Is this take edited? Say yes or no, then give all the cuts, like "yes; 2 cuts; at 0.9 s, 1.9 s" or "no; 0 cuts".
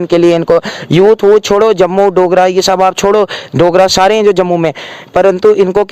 yes; 1 cut; at 3.9 s